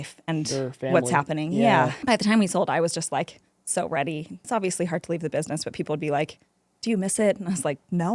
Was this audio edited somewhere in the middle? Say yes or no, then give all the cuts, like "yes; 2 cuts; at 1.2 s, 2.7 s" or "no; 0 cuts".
yes; 2 cuts; at 2.0 s, 4.5 s